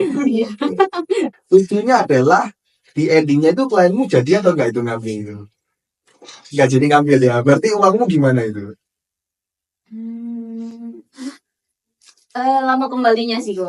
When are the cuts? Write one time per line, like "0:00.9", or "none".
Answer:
0:01.4